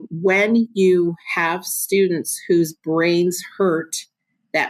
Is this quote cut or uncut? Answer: uncut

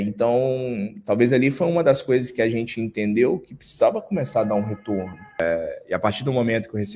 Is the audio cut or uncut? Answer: cut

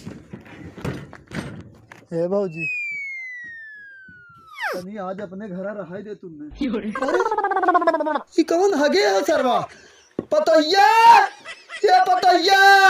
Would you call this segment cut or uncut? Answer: cut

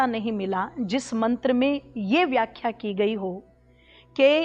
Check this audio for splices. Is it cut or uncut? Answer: uncut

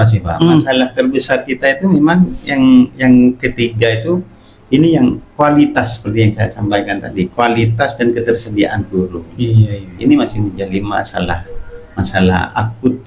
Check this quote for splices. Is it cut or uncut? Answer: uncut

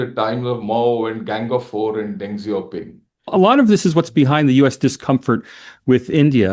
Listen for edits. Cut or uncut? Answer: cut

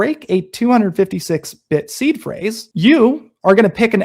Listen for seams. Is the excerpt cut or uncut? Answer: cut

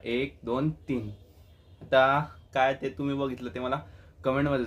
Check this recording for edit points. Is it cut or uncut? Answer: uncut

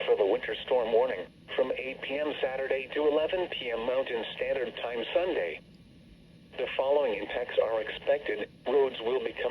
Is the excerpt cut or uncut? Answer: cut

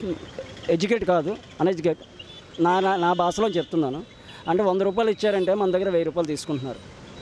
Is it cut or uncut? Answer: uncut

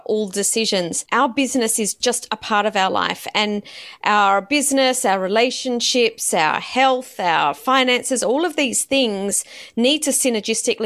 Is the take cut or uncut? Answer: cut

